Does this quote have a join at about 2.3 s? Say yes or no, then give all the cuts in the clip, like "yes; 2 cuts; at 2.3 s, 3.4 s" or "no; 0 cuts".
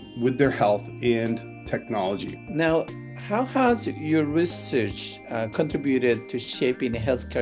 yes; 1 cut; at 2.3 s